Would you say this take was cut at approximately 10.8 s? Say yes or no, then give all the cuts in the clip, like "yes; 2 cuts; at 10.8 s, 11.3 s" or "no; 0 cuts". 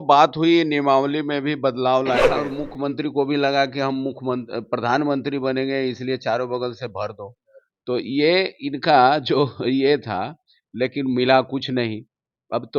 no; 1 cut; at 2.4 s